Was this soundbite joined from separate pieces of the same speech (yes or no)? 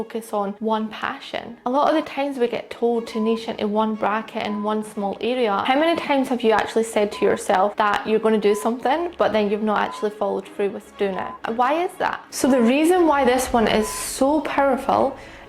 yes